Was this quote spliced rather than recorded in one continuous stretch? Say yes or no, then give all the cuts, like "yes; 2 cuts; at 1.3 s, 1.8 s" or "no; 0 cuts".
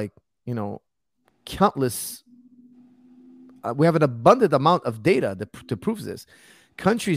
no; 0 cuts